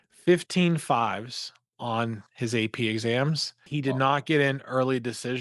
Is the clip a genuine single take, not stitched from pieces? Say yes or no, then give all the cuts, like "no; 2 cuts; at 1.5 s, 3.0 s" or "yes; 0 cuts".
no; 1 cut; at 3.7 s